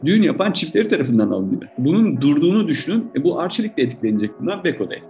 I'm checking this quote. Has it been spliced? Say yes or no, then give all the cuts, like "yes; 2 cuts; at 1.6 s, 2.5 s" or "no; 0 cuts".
yes; 1 cut; at 1.7 s